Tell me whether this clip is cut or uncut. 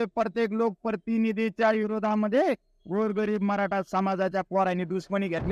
uncut